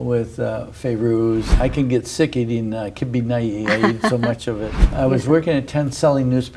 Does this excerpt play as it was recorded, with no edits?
no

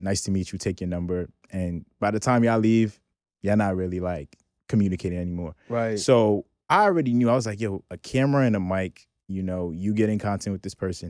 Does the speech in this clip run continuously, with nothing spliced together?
yes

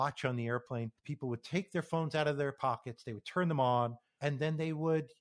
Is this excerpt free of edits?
no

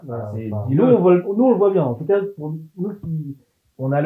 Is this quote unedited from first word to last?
yes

